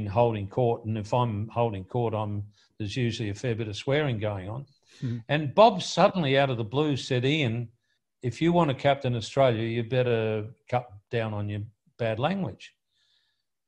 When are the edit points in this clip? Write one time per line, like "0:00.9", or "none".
none